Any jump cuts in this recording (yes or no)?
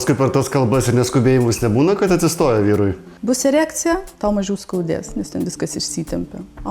yes